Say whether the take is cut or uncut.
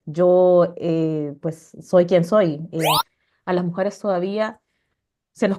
cut